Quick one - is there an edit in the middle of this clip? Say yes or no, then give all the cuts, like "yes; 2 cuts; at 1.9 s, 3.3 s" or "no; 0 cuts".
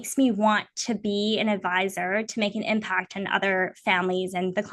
no; 0 cuts